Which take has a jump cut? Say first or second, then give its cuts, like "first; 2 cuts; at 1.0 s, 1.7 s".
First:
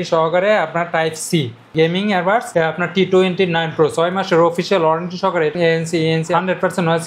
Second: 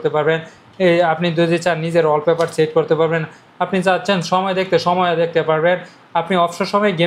first; 2 cuts; at 1.7 s, 5.6 s